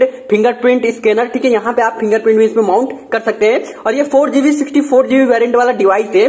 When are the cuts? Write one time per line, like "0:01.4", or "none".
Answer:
none